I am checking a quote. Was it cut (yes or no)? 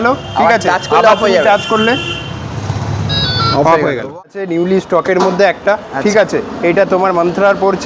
yes